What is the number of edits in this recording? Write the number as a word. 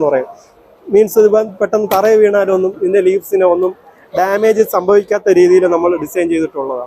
zero